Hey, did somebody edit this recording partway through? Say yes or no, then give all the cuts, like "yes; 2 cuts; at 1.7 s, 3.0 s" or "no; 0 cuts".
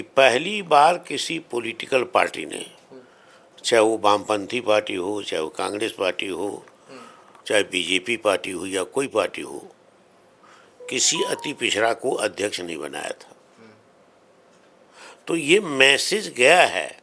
no; 0 cuts